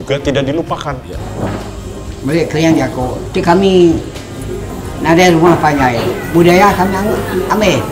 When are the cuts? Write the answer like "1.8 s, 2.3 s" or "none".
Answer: none